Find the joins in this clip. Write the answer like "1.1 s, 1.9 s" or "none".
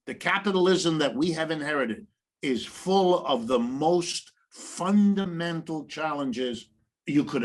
none